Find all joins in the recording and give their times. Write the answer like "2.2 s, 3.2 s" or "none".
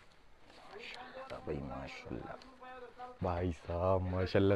3.1 s